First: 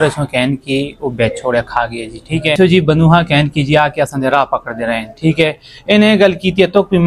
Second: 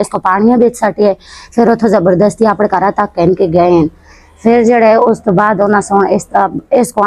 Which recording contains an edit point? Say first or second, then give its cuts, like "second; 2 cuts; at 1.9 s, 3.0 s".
first; 1 cut; at 2.6 s